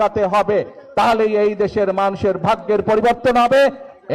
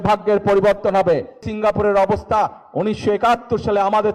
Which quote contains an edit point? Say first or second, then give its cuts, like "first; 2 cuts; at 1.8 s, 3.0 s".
second; 1 cut; at 1.5 s